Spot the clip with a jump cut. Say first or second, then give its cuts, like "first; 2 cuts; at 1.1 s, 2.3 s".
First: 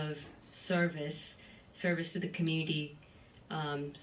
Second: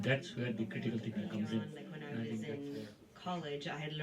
second; 1 cut; at 2.5 s